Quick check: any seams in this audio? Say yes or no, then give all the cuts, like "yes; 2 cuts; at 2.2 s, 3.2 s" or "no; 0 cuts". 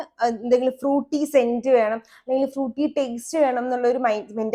no; 0 cuts